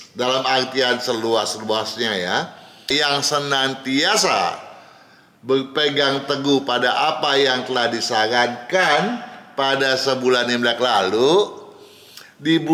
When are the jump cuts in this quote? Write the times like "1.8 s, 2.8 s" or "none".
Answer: 2.8 s